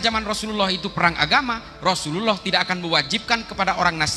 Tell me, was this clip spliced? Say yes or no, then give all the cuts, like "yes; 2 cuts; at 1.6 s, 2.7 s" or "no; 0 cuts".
no; 0 cuts